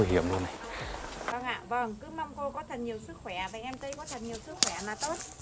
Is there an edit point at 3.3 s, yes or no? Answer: no